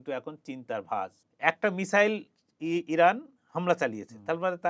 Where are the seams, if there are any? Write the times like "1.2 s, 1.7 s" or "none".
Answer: 1.2 s